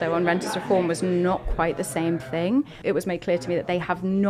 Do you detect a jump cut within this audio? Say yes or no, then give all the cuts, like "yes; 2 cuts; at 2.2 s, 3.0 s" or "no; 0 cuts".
yes; 1 cut; at 2.7 s